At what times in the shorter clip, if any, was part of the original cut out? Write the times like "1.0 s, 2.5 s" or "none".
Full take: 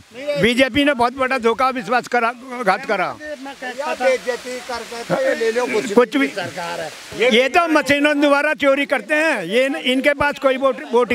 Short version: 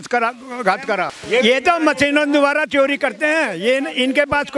1.2 s